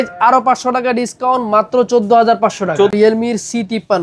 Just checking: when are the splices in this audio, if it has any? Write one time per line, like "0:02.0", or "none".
0:02.9